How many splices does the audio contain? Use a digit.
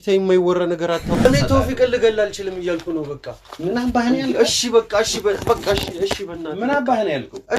1